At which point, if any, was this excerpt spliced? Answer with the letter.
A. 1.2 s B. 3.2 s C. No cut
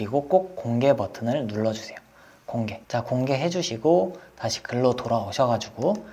C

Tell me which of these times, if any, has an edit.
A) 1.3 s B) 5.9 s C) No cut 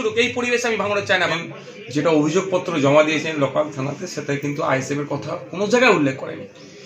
A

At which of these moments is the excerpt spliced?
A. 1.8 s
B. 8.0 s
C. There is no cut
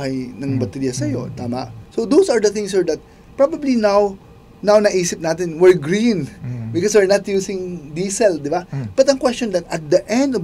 A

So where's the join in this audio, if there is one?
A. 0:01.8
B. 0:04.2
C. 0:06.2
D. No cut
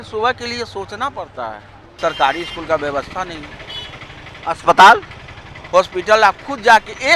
A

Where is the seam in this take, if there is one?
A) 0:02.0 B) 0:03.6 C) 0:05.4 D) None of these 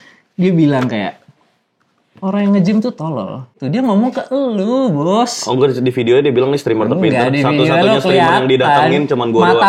B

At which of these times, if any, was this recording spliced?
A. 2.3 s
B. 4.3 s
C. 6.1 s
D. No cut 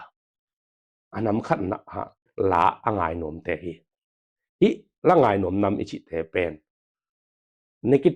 A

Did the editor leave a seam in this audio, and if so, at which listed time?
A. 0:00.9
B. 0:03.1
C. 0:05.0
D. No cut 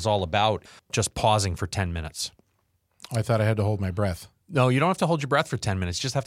A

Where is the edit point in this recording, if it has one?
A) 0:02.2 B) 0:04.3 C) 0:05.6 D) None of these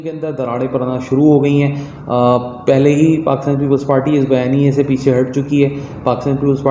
D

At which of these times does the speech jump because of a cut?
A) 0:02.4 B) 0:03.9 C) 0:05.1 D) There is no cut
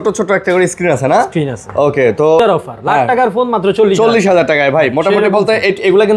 A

